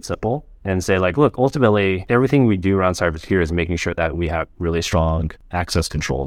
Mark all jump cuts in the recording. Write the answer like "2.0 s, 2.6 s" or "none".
2.1 s, 5.4 s